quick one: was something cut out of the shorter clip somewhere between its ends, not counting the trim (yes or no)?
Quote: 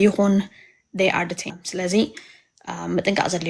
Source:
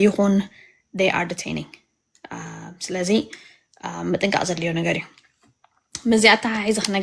yes